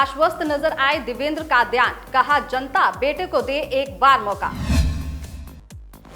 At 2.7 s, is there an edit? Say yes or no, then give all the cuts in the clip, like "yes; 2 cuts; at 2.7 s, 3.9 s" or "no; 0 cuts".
no; 0 cuts